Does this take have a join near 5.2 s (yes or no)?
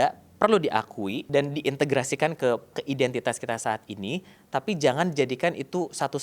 no